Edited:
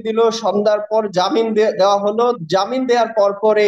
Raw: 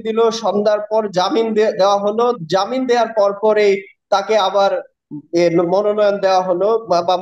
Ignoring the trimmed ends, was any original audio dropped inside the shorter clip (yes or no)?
no